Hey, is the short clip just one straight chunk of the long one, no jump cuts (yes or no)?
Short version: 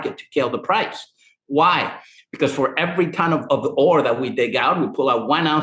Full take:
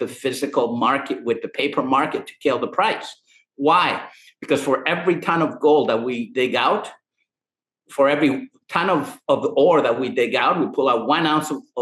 no